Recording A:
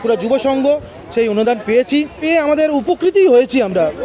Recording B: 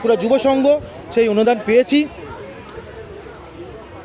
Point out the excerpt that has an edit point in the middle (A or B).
A